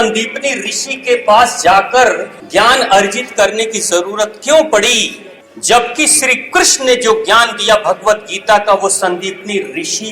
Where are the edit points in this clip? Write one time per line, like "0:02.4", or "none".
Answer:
0:02.3